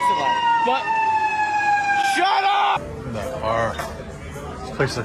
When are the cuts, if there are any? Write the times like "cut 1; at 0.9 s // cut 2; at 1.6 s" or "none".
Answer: cut 1; at 2.8 s